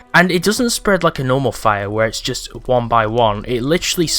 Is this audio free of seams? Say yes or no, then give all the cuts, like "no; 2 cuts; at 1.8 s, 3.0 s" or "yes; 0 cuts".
yes; 0 cuts